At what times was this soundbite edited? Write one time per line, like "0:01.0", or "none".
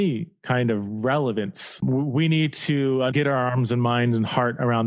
0:01.8
0:03.1